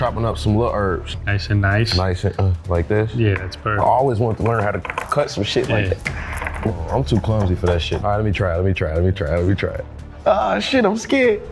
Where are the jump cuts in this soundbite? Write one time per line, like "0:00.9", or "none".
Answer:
0:01.1
0:06.7
0:08.0